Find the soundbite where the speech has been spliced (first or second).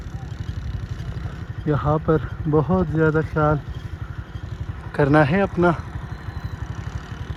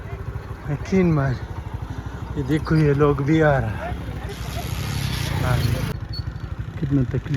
second